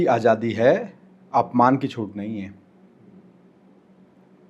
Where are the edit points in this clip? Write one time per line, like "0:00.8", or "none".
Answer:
none